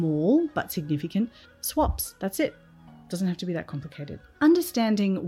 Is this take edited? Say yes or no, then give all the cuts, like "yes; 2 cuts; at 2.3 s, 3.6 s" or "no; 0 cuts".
yes; 1 cut; at 4.2 s